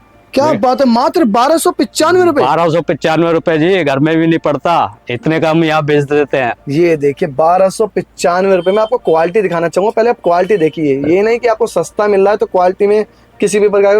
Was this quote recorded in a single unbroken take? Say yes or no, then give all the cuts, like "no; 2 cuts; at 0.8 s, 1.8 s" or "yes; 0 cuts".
yes; 0 cuts